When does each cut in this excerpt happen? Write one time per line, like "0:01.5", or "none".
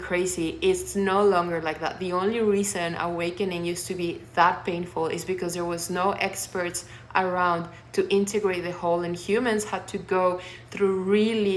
none